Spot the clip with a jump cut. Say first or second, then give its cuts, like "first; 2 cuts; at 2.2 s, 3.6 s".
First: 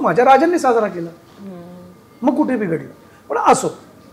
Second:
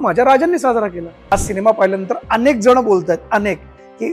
second; 1 cut; at 1.3 s